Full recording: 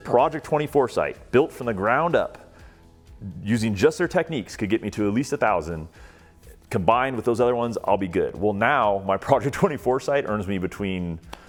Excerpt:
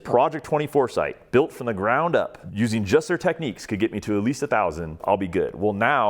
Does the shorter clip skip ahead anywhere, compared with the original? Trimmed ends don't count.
yes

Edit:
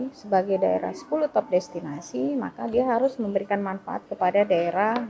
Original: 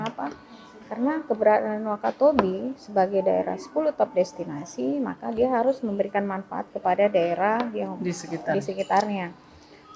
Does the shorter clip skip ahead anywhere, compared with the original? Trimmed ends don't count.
no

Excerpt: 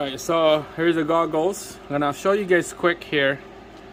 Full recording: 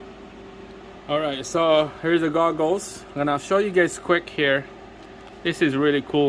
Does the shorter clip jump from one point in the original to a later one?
no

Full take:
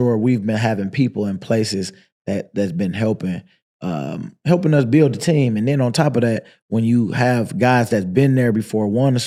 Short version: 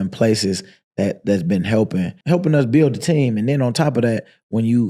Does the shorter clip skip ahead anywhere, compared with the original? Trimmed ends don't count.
yes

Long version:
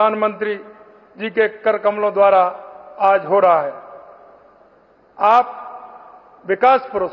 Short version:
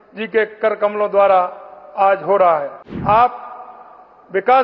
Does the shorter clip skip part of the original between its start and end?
yes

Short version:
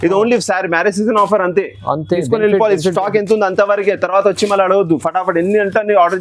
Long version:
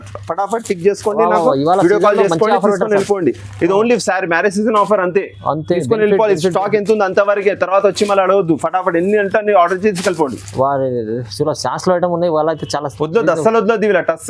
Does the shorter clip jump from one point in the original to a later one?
no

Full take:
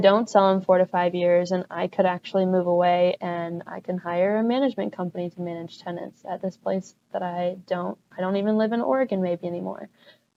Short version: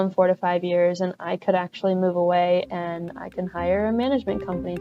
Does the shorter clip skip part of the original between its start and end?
no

